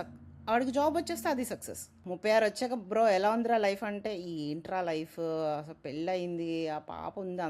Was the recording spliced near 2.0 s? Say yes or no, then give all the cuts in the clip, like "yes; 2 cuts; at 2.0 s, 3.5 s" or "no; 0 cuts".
yes; 1 cut; at 2.0 s